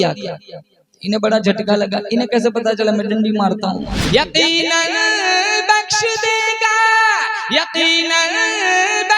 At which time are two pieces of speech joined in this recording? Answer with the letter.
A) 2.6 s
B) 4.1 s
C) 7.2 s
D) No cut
B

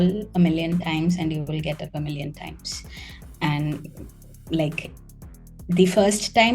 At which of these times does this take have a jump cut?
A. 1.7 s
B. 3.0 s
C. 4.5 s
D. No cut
D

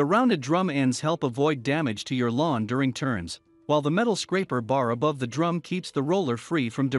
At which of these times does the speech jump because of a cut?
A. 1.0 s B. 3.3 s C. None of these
C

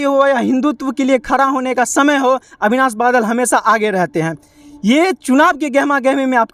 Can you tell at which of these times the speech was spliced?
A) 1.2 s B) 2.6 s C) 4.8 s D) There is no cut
D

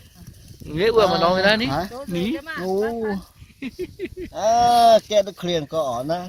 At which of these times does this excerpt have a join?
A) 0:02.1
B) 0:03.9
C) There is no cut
C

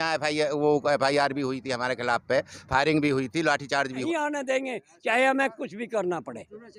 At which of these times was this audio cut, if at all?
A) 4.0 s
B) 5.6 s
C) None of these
A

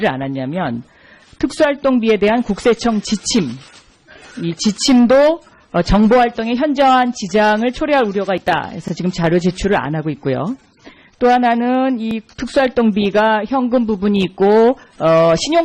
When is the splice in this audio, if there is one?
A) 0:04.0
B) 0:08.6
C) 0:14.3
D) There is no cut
B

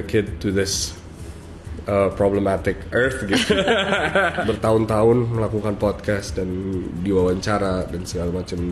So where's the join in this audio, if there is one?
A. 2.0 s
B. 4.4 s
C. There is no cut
B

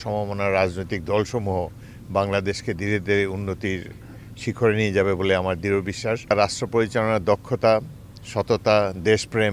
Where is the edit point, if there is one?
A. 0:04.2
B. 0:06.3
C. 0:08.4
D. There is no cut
B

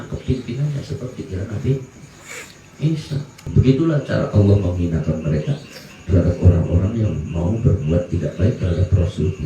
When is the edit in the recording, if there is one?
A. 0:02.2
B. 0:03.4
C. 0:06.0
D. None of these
B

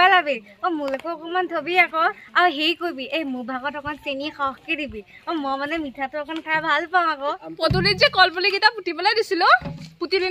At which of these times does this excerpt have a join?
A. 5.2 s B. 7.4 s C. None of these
B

